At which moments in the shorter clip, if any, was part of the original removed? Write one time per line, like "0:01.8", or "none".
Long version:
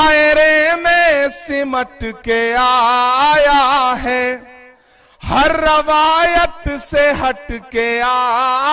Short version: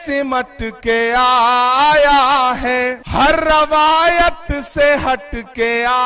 0:03.0